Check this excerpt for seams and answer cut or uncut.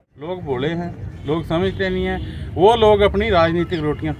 uncut